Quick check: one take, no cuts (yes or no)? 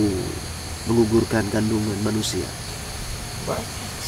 no